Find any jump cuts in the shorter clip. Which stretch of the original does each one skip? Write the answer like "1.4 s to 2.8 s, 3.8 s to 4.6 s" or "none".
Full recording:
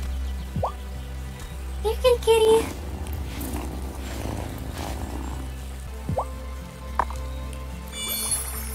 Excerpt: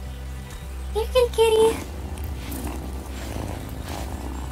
none